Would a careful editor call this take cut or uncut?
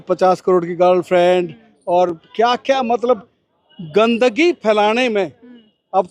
uncut